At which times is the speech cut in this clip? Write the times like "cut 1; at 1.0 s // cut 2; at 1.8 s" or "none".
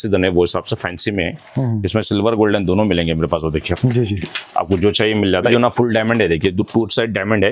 cut 1; at 5.5 s